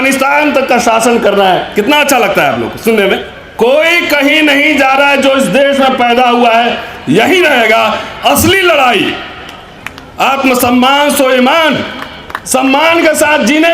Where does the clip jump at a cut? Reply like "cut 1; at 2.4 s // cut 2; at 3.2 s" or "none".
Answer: cut 1; at 3.4 s